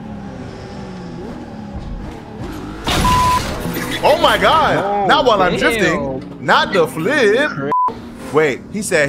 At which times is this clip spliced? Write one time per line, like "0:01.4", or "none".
0:07.9